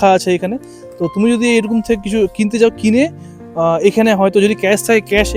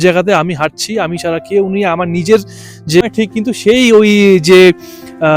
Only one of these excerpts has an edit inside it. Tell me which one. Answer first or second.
second